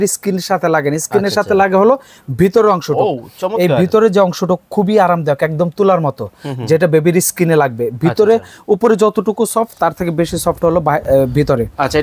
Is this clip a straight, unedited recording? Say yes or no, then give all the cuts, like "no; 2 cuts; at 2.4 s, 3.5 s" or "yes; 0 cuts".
yes; 0 cuts